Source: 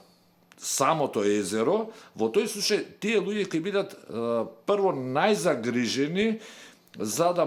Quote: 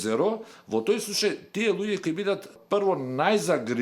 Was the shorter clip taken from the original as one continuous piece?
no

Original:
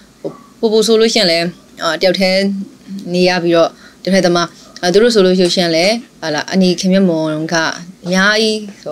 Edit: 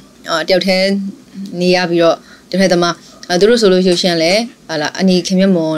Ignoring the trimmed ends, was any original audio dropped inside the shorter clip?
no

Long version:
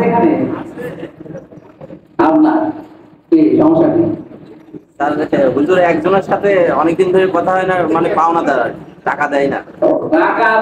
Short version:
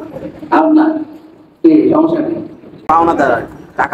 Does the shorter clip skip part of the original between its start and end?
yes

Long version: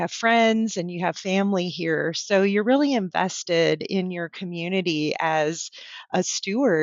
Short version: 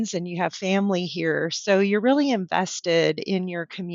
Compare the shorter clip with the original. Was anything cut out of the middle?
no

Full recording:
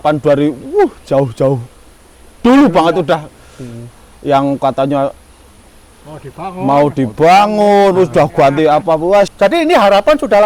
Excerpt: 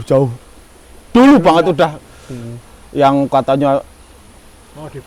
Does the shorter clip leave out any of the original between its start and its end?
no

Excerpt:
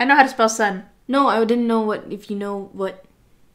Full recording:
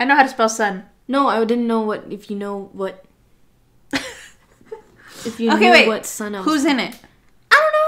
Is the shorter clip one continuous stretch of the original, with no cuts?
yes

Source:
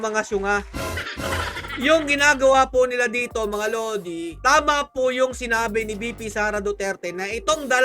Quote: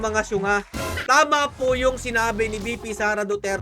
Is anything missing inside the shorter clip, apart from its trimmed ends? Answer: yes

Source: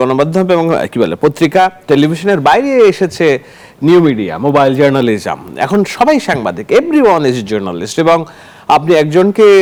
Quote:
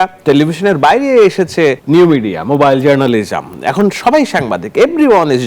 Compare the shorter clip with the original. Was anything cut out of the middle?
yes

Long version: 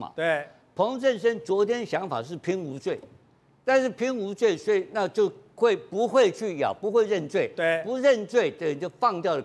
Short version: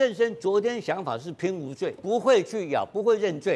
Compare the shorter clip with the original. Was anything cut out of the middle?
yes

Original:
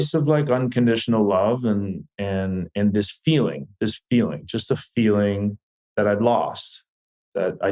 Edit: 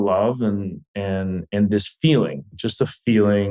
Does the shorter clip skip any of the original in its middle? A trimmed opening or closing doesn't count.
yes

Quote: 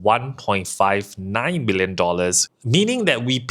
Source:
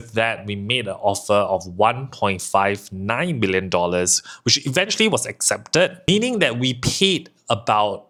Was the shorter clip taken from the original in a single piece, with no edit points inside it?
no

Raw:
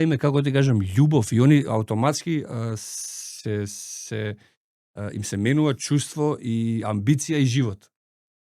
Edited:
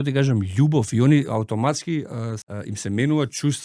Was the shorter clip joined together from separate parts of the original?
yes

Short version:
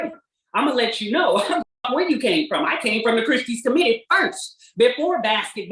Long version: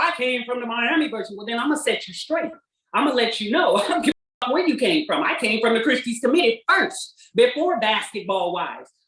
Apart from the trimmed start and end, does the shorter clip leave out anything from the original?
yes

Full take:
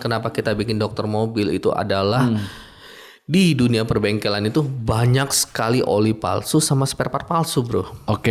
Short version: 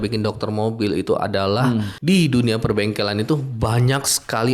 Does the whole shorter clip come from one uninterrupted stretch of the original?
no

